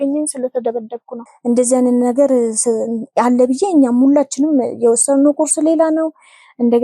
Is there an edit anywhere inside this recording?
yes; 1 cut; at 1.2 s

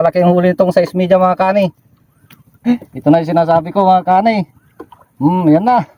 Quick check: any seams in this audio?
yes; 1 cut; at 2.6 s

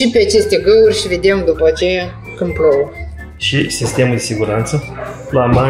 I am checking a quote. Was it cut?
no; 0 cuts

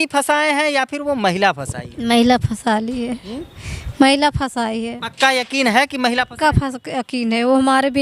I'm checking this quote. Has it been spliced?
no; 0 cuts

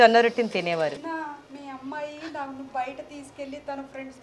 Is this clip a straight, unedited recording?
no; 1 cut; at 1.0 s

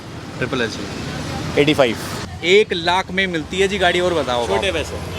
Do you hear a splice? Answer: yes; 1 cut; at 2.2 s

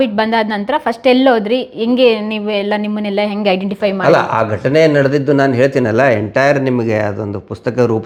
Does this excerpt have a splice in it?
no; 0 cuts

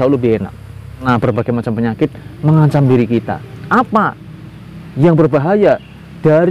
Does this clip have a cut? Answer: yes; 1 cut; at 1.0 s

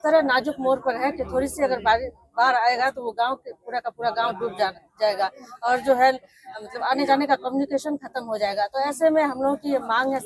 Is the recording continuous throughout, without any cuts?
yes; 0 cuts

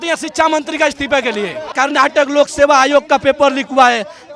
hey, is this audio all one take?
no; 1 cut; at 1.7 s

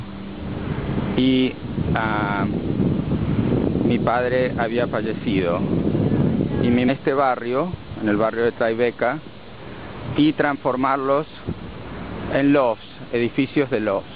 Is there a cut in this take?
no; 0 cuts

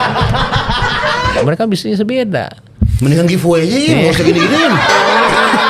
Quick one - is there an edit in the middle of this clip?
yes; 1 cut; at 1.4 s

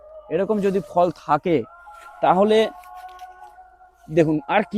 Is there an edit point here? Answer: no; 0 cuts

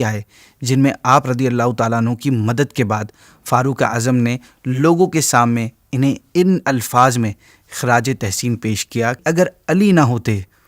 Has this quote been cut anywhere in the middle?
yes; 1 cut; at 9.2 s

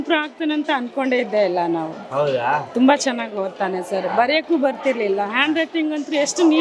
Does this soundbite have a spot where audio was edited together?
no; 0 cuts

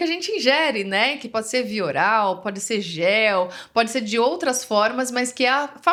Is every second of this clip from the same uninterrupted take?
yes; 0 cuts

